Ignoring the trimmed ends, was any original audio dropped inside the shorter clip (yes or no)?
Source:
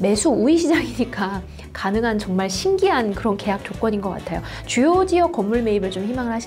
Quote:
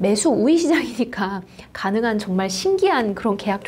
no